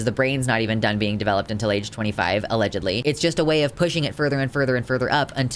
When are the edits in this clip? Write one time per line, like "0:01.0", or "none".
0:03.0